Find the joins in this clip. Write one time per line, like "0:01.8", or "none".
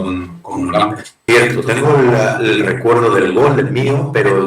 0:01.2